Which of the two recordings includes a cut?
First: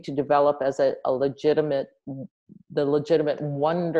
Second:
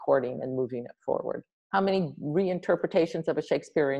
second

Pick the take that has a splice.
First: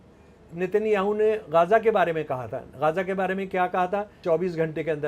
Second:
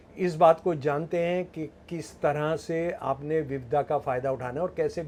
first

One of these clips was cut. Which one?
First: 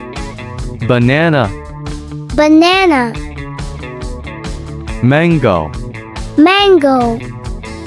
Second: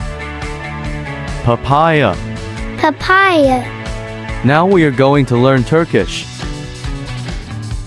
second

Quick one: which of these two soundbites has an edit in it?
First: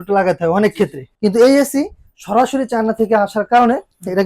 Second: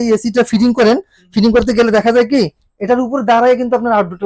first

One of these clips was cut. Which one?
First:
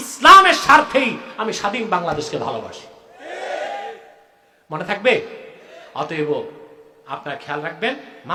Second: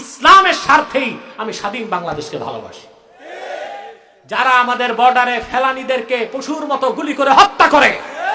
second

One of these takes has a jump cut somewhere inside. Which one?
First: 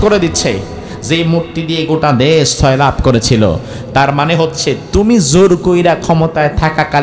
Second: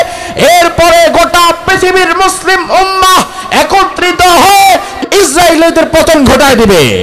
second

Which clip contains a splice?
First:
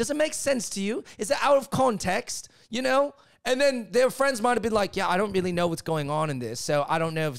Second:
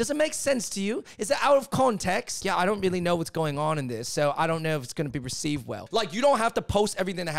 second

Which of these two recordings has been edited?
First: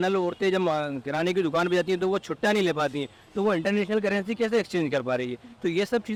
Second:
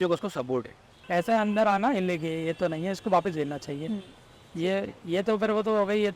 second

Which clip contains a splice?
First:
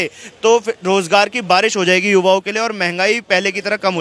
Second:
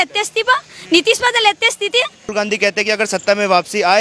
second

